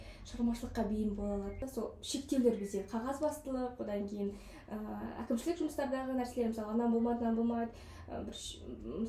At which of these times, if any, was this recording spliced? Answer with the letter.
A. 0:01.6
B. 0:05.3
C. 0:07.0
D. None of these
A